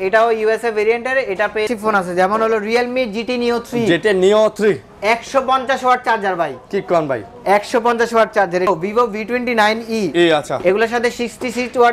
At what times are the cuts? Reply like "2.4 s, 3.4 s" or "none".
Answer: 1.7 s, 8.7 s